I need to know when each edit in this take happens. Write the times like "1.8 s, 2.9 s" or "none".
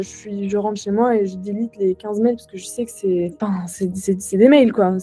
3.3 s